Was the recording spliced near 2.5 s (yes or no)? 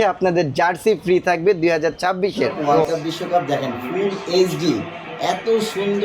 yes